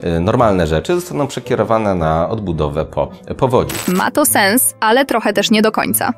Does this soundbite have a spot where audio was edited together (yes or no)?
no